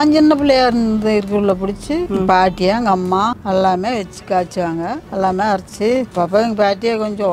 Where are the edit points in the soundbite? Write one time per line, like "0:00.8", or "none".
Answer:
0:02.1
0:03.4
0:05.0
0:06.1